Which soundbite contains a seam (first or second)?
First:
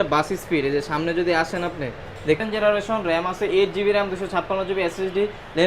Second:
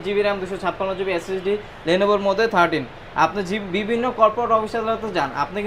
first